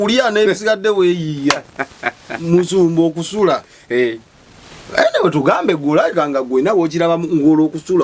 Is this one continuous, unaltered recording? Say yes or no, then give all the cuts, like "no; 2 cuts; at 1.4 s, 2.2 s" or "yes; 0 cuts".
yes; 0 cuts